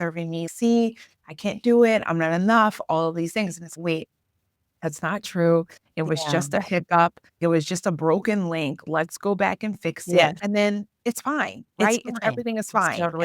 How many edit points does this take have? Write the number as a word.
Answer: one